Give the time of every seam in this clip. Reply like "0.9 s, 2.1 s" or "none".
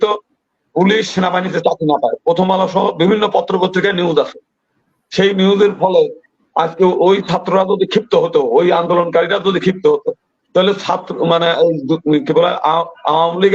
none